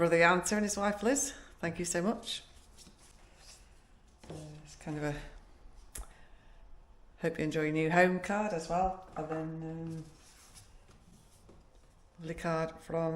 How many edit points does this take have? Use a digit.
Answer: 0